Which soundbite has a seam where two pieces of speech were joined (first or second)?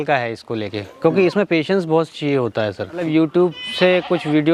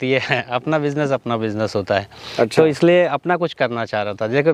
first